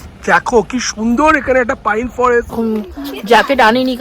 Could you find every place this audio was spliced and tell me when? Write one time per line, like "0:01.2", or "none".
0:02.6